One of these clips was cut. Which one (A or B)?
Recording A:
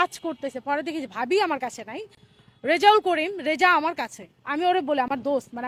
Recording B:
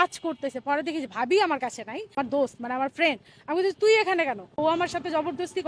B